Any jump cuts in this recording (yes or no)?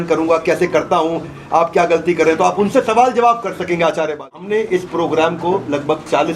yes